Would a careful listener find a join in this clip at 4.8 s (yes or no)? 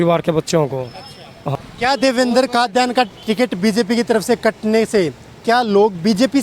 no